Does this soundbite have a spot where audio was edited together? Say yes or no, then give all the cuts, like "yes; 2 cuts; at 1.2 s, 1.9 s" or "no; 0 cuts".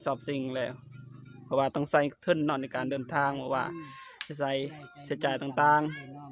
no; 0 cuts